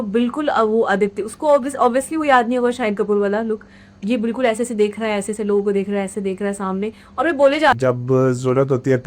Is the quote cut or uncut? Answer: cut